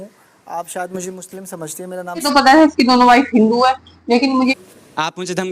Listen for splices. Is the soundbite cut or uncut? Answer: cut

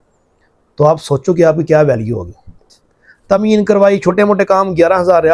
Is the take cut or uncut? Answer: cut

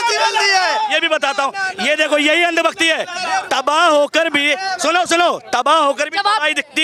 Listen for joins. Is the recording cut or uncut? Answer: uncut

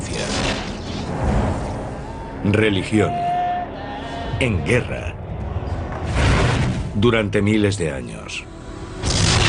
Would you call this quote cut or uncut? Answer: uncut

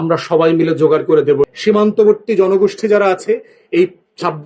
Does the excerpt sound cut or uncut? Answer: cut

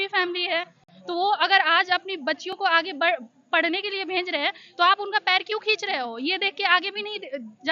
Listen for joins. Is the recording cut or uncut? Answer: uncut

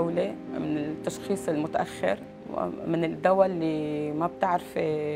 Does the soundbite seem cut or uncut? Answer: cut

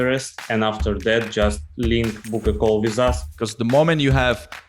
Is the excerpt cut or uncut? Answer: cut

